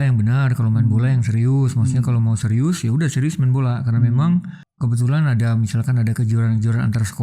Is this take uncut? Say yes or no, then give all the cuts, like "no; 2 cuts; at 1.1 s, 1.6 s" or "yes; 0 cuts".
no; 1 cut; at 4.6 s